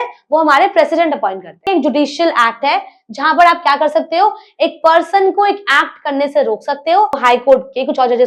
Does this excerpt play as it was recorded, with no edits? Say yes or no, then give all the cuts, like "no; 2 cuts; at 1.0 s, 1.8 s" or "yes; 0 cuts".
no; 2 cuts; at 1.7 s, 7.2 s